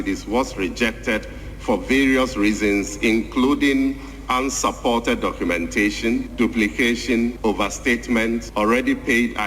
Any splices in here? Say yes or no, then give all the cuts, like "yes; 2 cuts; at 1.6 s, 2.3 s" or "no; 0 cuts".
yes; 3 cuts; at 6.3 s, 7.4 s, 8.5 s